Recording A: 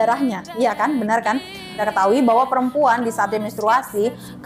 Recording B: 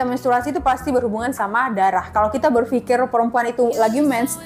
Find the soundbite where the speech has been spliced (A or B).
A